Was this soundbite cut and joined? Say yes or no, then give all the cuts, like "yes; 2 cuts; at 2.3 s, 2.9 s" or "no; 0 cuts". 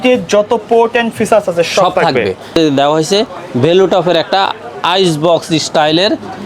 yes; 1 cut; at 2.5 s